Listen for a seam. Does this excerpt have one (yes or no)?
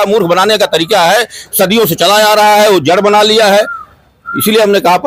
no